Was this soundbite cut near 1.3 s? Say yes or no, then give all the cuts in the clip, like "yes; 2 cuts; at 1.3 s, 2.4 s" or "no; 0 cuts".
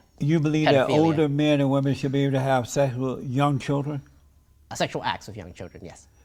no; 0 cuts